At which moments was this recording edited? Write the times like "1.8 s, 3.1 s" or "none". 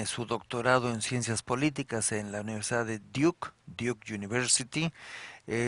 3.5 s